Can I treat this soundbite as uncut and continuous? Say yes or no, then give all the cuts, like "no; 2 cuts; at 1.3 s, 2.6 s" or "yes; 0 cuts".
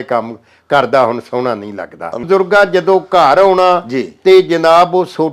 no; 1 cut; at 2.1 s